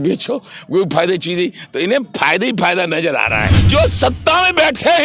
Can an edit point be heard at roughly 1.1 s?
no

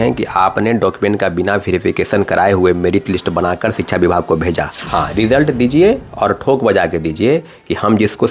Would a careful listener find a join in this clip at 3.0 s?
no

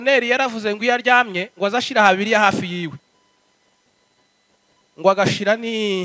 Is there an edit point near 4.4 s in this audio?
no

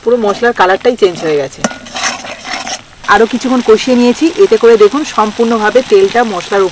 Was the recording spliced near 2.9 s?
no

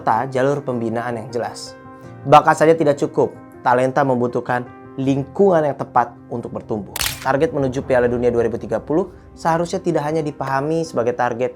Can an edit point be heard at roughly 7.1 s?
yes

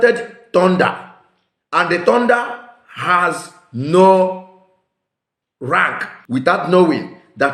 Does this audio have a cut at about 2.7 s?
no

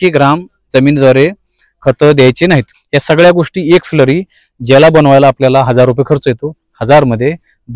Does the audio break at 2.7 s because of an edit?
yes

